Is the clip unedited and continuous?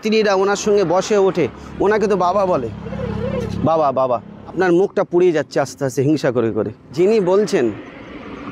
no; 2 cuts; at 4.4 s, 6.8 s

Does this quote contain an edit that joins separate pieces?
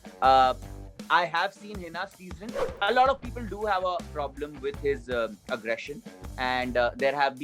yes; 1 cut; at 2.7 s

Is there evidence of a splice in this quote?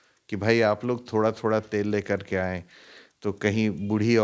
no; 0 cuts

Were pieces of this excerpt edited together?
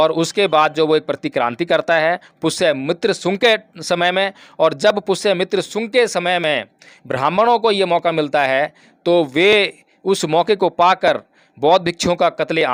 no; 0 cuts

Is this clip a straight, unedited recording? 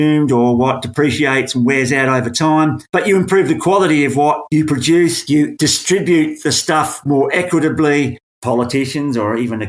no; 1 cut; at 8.3 s

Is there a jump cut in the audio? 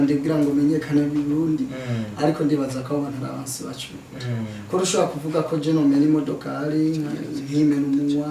no; 0 cuts

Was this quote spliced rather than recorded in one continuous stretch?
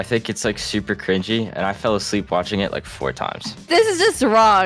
yes; 1 cut; at 3.5 s

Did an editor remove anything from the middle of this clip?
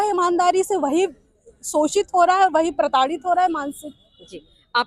no; 0 cuts

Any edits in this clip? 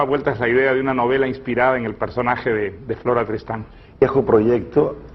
no; 0 cuts

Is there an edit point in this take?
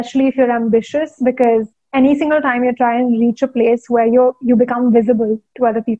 no; 0 cuts

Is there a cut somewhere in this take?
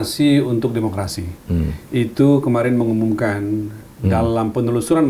no; 0 cuts

